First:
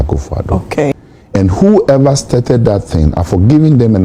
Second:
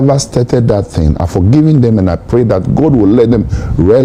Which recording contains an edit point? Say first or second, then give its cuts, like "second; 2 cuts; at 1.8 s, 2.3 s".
first; 1 cut; at 0.9 s